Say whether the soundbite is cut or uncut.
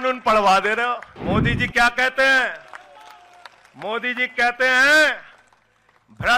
cut